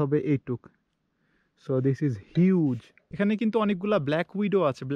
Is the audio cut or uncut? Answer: cut